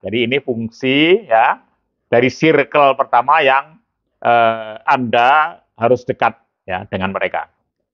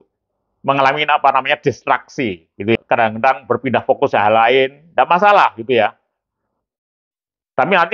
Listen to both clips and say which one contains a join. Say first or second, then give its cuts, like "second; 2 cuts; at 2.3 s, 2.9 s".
second; 1 cut; at 2.8 s